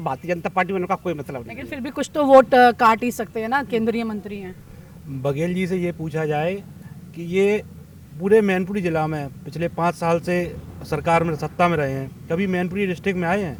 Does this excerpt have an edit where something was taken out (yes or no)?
no